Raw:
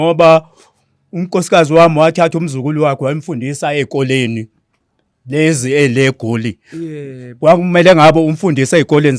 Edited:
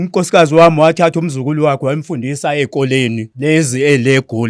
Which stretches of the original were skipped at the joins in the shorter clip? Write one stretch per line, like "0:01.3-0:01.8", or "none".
0:04.5-0:05.2